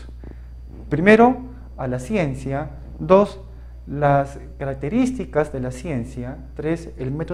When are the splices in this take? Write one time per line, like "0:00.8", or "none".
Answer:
none

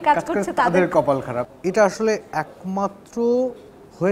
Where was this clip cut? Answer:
0:01.5

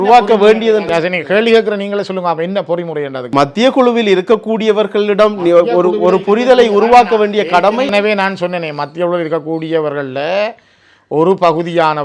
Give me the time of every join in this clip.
none

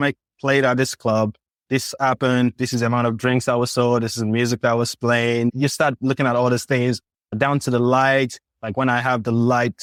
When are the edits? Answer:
none

